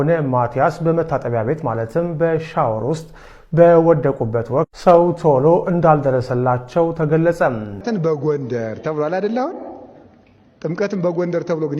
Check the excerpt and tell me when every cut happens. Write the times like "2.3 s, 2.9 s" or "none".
7.7 s